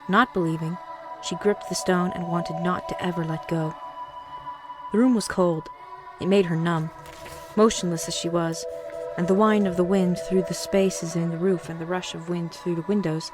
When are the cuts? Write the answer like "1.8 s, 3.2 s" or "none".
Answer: 10.5 s